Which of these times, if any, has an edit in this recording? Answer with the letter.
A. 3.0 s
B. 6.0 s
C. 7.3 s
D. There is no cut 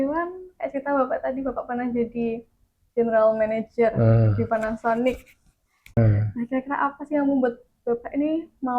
B